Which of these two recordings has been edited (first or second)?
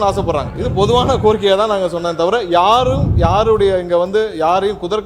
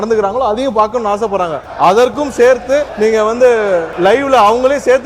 second